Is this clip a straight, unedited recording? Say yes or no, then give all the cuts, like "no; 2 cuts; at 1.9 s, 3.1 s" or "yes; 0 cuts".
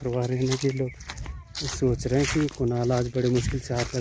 yes; 0 cuts